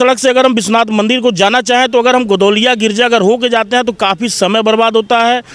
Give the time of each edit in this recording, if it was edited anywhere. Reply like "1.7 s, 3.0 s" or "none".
none